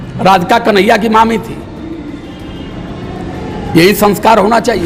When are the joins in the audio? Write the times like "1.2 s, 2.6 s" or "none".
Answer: none